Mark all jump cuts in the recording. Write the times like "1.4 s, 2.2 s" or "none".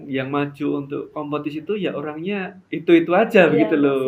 none